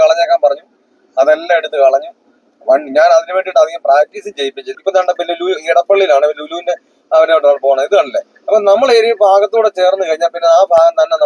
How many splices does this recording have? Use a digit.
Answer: 1